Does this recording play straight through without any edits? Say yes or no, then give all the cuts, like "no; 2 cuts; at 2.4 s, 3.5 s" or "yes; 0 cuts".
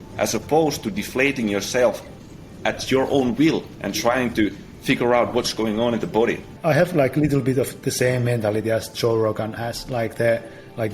no; 2 cuts; at 3.8 s, 6.5 s